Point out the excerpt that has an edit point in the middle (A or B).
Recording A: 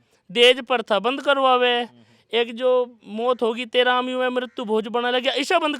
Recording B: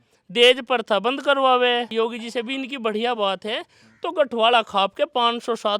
B